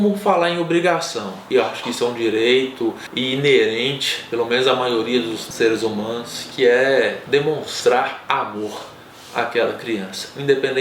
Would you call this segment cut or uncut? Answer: cut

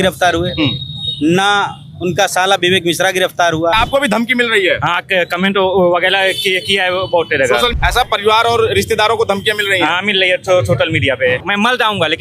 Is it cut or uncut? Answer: cut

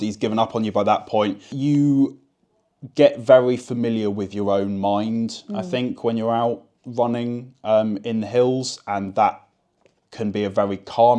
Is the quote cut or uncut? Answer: cut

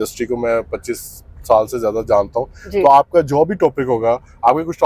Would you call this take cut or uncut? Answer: uncut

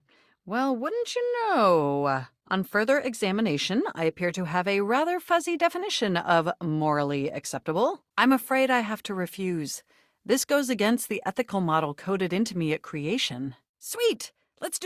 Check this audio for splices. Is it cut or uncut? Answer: cut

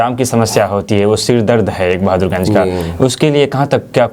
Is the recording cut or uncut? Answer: uncut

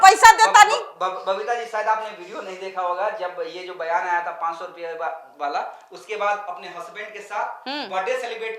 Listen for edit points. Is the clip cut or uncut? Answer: uncut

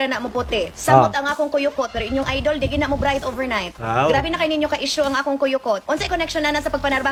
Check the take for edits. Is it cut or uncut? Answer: uncut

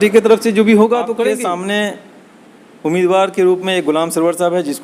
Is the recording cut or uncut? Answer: cut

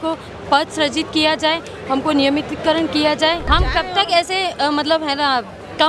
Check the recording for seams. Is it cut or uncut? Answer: cut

